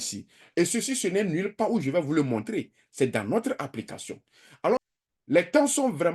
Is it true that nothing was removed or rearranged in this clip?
no; 1 cut; at 4.8 s

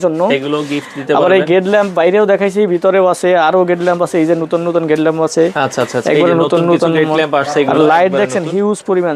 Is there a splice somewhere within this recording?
no; 0 cuts

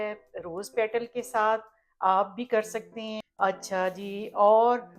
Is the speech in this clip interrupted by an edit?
yes; 1 cut; at 3.2 s

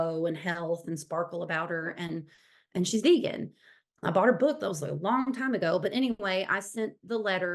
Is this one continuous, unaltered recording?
yes; 0 cuts

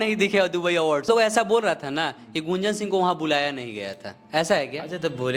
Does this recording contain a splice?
yes; 1 cut; at 1.1 s

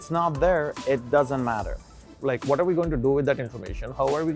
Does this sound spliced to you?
yes; 1 cut; at 2.0 s

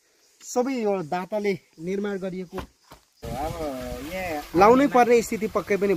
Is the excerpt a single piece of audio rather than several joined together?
no; 1 cut; at 3.2 s

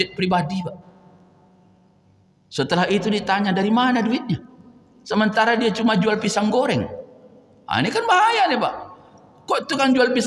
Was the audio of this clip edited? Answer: no; 0 cuts

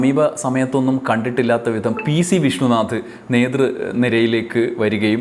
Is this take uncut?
yes; 0 cuts

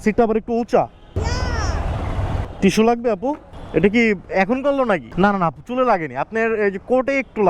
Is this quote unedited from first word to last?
no; 3 cuts; at 1.2 s, 2.5 s, 5.1 s

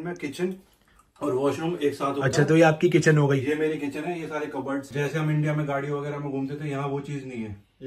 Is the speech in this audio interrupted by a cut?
yes; 1 cut; at 4.9 s

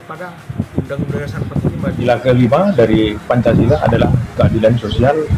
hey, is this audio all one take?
no; 1 cut; at 2.0 s

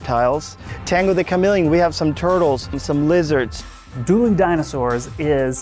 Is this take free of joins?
no; 2 cuts; at 2.8 s, 3.5 s

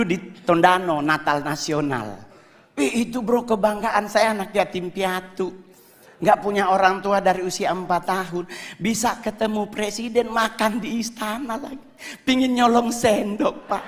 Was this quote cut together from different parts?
no; 0 cuts

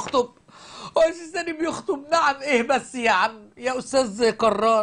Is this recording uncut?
yes; 0 cuts

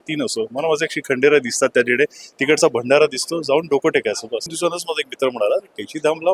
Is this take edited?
yes; 1 cut; at 4.5 s

